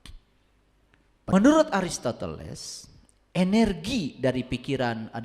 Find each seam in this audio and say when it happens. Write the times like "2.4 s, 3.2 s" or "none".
1.3 s

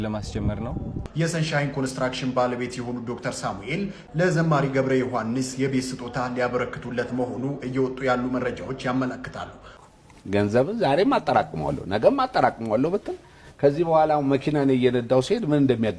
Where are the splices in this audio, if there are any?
0.9 s, 9.8 s

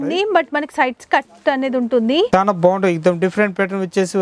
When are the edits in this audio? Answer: 2.3 s

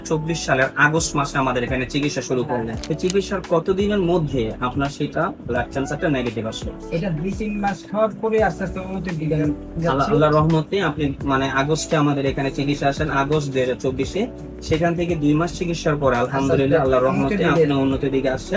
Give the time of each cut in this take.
2.8 s

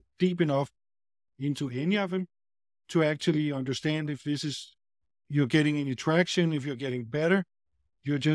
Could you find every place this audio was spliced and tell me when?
none

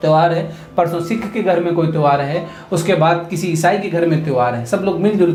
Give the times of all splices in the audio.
none

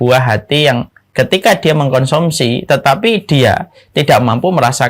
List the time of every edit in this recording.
1.0 s

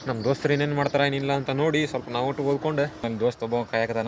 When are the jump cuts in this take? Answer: 3.0 s

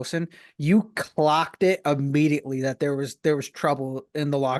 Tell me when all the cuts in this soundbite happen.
none

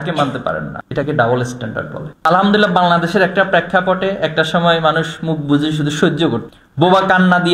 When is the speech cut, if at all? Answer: 2.3 s

